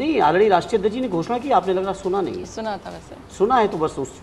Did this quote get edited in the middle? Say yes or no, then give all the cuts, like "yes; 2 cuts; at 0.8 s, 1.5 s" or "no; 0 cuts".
no; 0 cuts